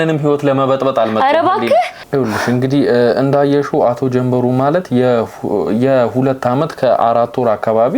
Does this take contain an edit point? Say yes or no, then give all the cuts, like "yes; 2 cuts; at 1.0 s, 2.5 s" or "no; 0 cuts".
yes; 1 cut; at 2.0 s